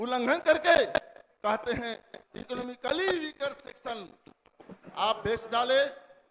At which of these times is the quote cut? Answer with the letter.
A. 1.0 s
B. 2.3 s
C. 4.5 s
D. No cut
C